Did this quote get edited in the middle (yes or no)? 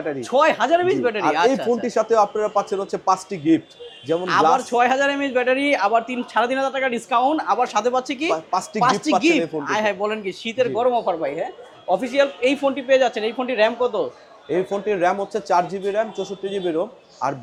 no